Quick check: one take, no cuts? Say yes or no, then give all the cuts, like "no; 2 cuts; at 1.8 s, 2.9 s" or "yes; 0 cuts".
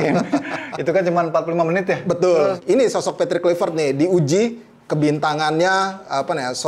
no; 1 cut; at 2.6 s